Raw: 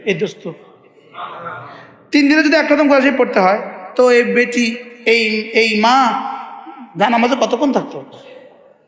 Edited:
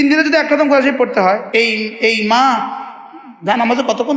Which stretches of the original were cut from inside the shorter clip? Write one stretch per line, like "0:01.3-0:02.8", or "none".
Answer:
0:03.6-0:05.0